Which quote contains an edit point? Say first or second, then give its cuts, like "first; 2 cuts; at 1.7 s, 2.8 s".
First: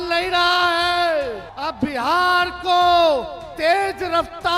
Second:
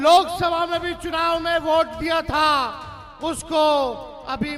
first; 1 cut; at 1.5 s